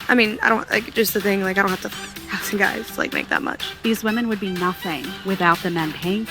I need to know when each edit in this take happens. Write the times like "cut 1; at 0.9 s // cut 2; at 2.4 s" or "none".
cut 1; at 3.7 s // cut 2; at 5.1 s